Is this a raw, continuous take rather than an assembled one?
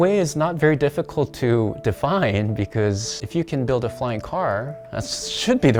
yes; 0 cuts

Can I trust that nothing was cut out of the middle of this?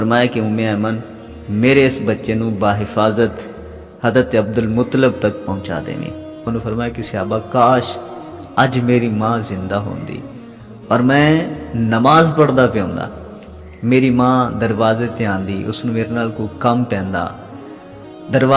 no; 1 cut; at 6.5 s

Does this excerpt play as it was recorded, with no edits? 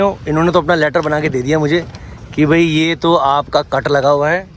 yes; 0 cuts

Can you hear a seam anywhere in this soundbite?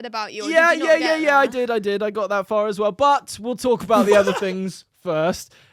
no; 0 cuts

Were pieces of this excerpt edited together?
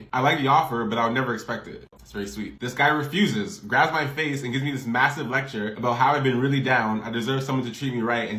yes; 1 cut; at 1.9 s

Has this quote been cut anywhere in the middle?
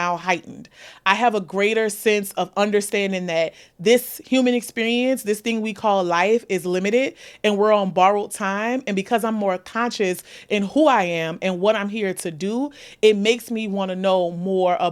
no; 0 cuts

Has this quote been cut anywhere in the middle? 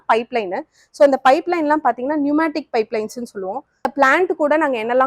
yes; 1 cut; at 3.9 s

